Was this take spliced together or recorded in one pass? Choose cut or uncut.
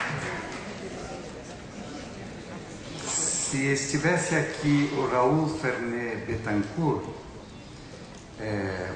uncut